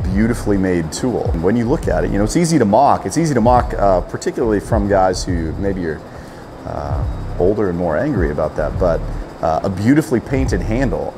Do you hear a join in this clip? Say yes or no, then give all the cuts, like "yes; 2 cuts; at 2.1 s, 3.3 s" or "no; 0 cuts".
yes; 1 cut; at 1.4 s